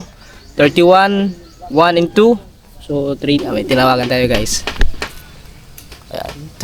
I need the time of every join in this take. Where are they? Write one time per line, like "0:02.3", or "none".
0:03.4